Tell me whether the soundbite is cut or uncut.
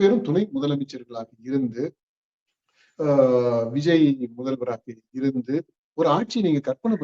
uncut